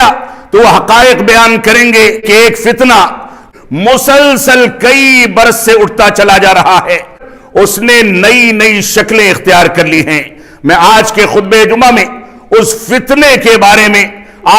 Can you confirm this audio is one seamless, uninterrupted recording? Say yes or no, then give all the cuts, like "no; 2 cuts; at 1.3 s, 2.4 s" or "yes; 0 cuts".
no; 3 cuts; at 2.2 s, 3.4 s, 7.2 s